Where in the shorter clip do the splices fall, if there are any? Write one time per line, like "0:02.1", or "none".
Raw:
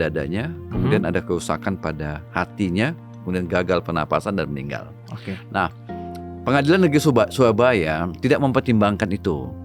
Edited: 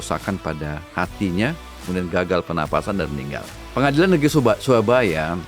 0:03.6